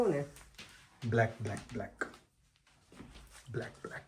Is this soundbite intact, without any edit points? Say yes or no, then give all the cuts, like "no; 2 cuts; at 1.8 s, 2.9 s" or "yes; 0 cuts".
yes; 0 cuts